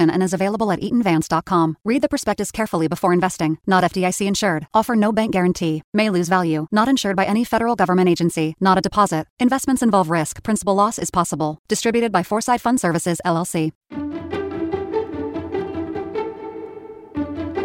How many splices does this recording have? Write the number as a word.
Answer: one